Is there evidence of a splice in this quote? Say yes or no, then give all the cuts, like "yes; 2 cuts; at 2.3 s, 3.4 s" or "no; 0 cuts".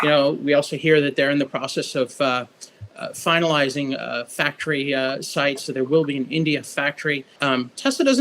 yes; 1 cut; at 7.3 s